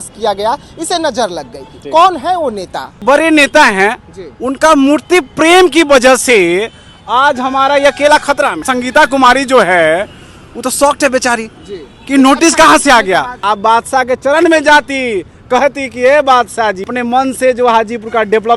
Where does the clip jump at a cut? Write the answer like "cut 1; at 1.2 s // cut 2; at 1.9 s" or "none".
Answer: cut 1; at 3.0 s // cut 2; at 8.6 s // cut 3; at 13.4 s // cut 4; at 16.9 s